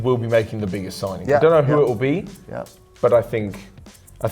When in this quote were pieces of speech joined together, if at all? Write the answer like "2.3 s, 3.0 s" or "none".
none